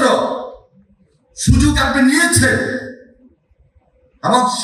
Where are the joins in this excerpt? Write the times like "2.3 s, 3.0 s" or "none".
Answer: none